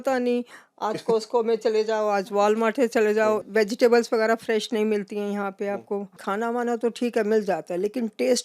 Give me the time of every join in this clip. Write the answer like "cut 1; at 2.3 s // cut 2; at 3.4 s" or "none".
cut 1; at 3.4 s // cut 2; at 6.2 s